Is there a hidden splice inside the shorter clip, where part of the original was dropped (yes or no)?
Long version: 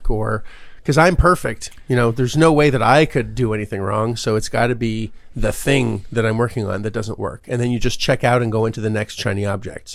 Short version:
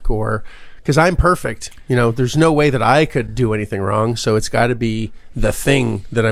no